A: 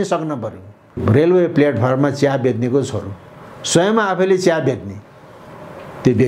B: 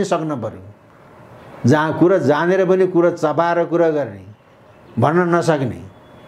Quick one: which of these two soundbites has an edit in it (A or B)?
A